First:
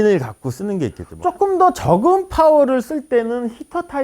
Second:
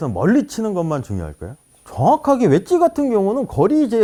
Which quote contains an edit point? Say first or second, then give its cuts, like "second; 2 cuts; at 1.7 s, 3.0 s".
first; 1 cut; at 1.1 s